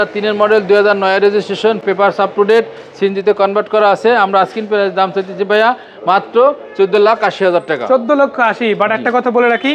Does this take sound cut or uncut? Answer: uncut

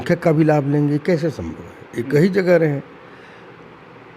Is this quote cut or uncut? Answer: uncut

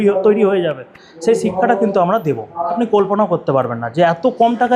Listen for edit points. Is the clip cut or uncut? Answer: cut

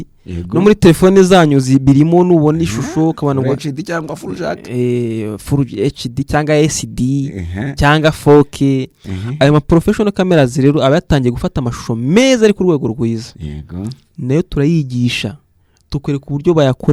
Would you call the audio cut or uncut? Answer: uncut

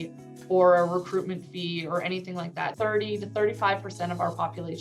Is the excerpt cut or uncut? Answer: cut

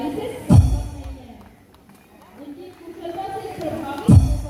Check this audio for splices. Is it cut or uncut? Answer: uncut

